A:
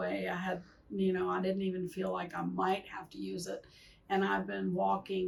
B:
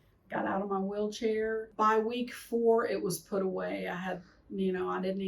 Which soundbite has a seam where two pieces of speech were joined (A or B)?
B